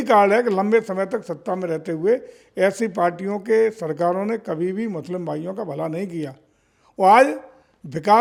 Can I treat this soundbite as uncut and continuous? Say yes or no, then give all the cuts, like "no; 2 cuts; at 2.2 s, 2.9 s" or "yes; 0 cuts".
yes; 0 cuts